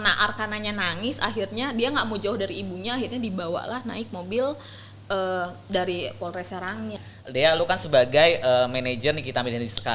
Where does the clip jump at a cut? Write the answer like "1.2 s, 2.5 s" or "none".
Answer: 7.0 s